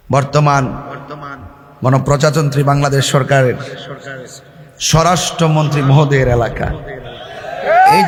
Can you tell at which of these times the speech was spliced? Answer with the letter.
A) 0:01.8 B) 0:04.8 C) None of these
C